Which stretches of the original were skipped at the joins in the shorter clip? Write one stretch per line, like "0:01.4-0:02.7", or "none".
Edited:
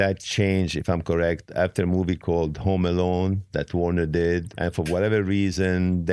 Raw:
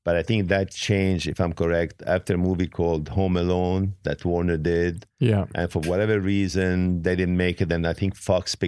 0:05.0-0:05.5